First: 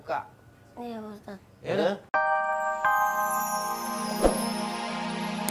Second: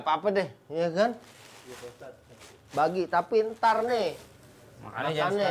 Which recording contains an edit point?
first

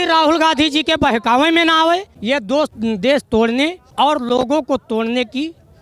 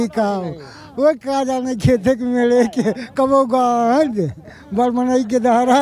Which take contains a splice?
first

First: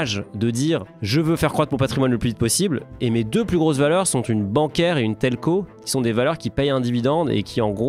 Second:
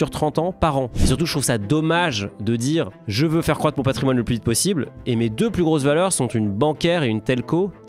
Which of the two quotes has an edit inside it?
second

